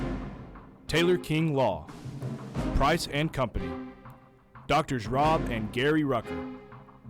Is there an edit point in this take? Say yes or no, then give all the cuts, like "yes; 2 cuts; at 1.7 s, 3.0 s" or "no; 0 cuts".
yes; 1 cut; at 0.9 s